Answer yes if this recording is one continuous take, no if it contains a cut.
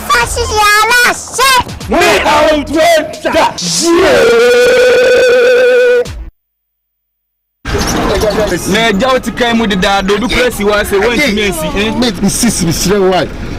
no